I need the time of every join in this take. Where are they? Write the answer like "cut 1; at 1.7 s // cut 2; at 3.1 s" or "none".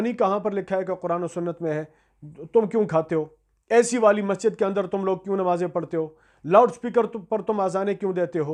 none